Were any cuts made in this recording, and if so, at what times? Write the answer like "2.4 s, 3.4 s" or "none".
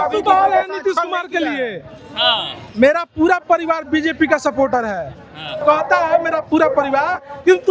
none